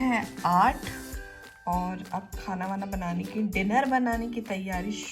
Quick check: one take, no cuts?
yes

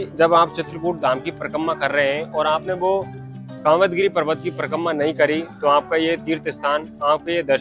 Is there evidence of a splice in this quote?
no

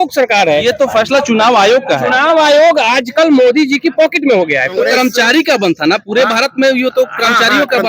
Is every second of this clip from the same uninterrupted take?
no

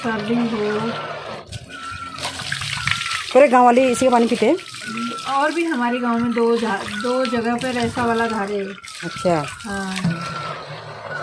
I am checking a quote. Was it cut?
no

